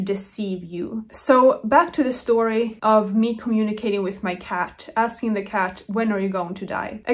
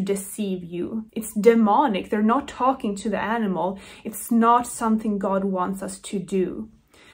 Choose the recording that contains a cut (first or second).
second